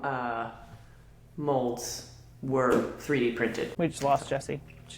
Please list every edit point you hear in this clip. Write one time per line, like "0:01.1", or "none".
0:03.7